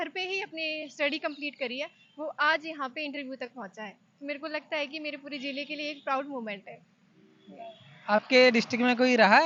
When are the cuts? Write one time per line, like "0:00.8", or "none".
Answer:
none